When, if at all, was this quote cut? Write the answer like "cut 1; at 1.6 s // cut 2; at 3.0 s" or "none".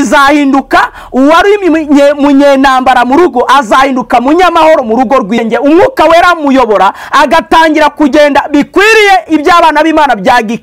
cut 1; at 5.4 s